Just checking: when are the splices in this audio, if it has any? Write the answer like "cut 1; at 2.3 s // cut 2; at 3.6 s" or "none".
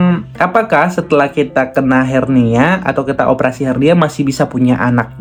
none